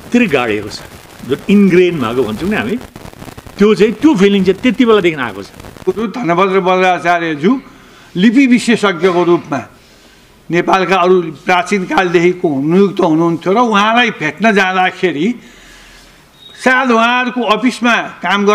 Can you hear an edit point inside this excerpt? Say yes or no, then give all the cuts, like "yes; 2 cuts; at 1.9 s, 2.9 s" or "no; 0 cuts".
yes; 1 cut; at 5.9 s